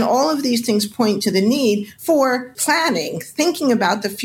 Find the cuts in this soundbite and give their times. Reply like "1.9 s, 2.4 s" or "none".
2.5 s